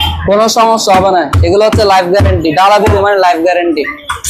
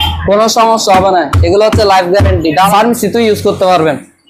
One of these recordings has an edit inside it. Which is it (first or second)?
second